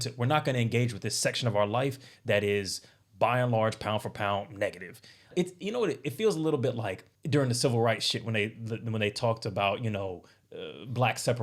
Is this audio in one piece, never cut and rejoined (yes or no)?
no